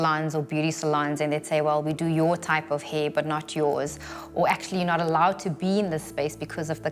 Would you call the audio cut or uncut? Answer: uncut